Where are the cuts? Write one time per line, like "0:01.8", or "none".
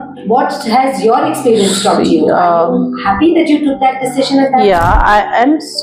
none